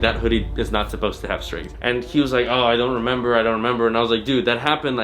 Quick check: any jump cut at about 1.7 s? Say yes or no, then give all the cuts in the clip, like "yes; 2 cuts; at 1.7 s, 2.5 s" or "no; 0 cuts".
yes; 1 cut; at 1.7 s